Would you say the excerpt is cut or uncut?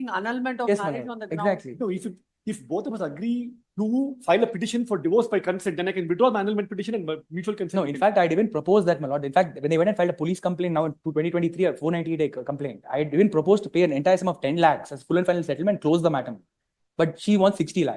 uncut